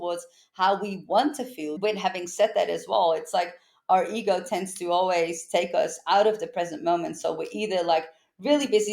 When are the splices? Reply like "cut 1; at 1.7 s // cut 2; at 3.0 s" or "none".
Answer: cut 1; at 1.7 s